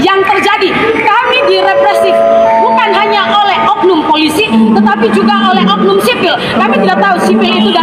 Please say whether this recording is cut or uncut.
uncut